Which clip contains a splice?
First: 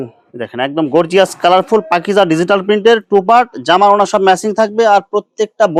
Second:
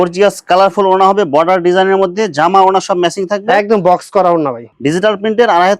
second; 1 cut; at 4.7 s

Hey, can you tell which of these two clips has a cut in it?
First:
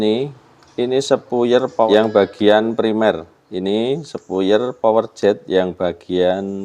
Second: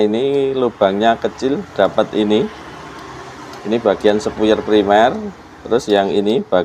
first; 1 cut; at 1.9 s

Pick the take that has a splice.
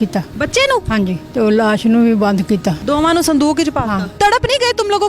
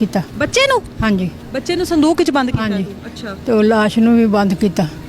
first; 3 cuts; at 0.9 s, 2.8 s, 4.1 s

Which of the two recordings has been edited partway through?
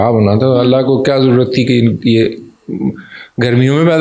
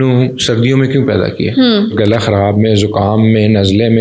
second; 1 cut; at 1.9 s

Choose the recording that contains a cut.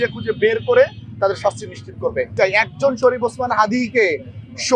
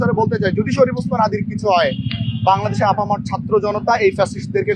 first; 1 cut; at 2.3 s

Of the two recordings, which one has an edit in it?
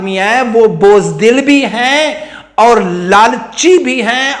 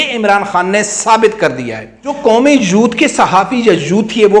second; 1 cut; at 2.2 s

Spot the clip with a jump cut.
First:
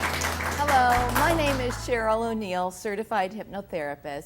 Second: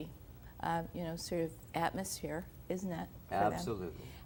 first; 1 cut; at 1.8 s

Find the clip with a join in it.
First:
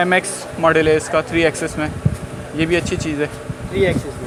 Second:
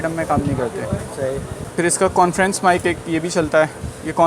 second; 1 cut; at 1.6 s

